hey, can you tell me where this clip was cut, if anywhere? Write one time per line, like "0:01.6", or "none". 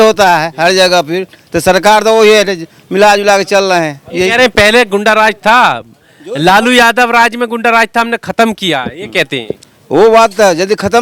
none